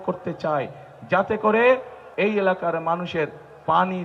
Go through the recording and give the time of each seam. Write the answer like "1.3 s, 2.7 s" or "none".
2.0 s

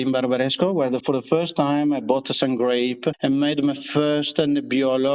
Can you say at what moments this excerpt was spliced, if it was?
1.0 s

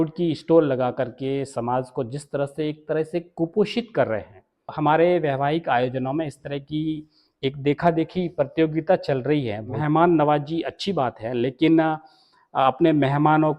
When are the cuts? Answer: 4.7 s, 9.7 s

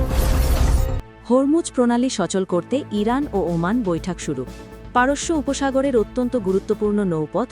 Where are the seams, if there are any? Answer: 1.1 s

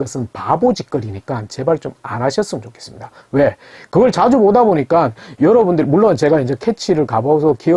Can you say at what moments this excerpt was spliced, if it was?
none

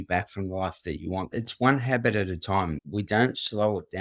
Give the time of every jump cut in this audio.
1.4 s, 2.8 s

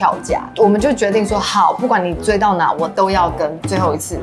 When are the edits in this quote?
none

